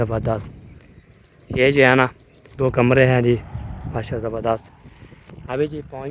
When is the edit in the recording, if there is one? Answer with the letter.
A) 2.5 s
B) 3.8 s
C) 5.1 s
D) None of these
A